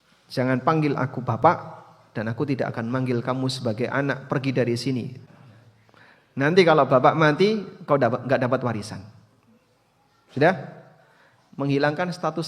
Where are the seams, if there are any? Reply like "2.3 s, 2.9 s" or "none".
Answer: 5.2 s